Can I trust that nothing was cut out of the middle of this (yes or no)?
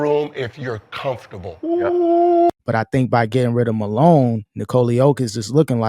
no